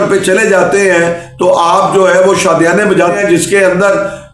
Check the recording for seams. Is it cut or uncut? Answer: cut